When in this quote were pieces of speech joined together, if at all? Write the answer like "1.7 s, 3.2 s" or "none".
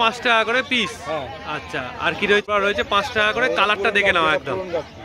2.5 s